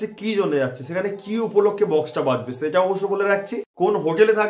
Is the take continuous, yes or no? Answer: no